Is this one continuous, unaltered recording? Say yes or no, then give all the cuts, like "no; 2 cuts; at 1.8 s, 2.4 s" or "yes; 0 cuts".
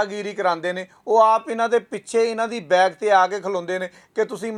yes; 0 cuts